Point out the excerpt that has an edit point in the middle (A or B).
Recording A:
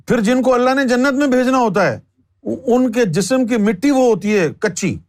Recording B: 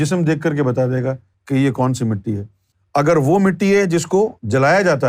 B